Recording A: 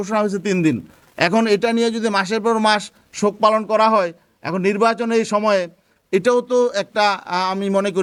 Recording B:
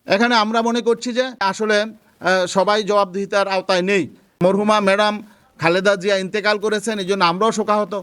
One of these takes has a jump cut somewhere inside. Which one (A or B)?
B